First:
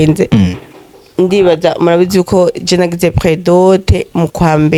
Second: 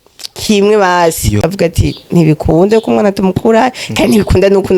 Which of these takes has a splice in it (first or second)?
second